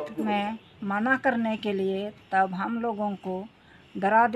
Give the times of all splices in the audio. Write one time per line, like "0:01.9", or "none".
none